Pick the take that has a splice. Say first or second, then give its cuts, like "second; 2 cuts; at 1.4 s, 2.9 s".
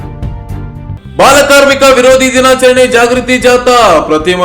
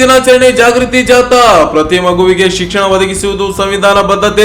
first; 1 cut; at 0.9 s